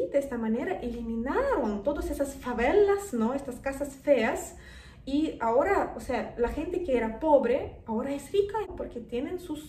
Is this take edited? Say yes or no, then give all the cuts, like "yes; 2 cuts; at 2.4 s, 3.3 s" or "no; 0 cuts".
yes; 1 cut; at 8.7 s